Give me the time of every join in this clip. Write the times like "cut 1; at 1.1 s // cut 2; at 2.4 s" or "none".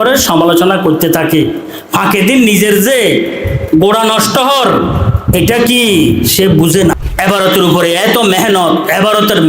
cut 1; at 6.9 s

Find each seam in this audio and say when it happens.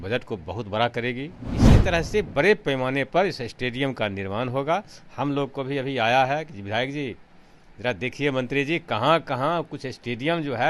cut 1; at 1.5 s

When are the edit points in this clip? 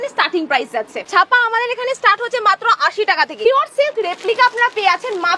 cut 1; at 1.0 s // cut 2; at 3.5 s

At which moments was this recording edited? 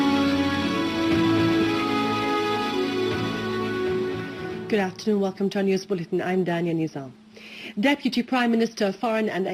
cut 1; at 4.1 s

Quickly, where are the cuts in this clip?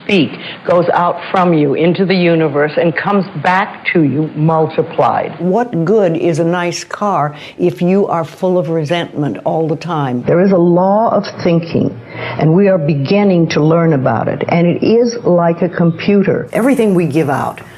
cut 1; at 5.4 s // cut 2; at 10.2 s // cut 3; at 16.5 s

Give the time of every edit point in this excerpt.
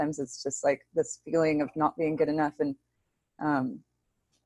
none

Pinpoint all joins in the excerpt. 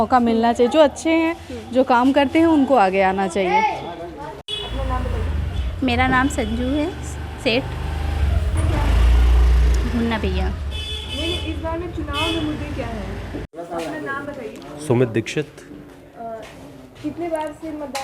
none

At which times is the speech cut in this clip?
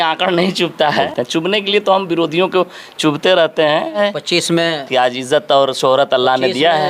cut 1; at 1.1 s // cut 2; at 4.0 s

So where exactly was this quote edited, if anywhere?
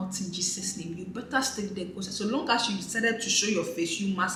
none

